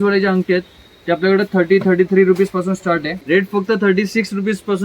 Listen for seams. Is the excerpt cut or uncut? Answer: cut